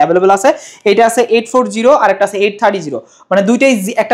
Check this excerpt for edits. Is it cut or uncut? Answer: uncut